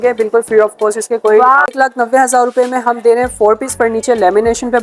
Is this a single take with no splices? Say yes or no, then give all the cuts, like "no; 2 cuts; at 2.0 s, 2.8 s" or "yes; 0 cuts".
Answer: no; 1 cut; at 1.6 s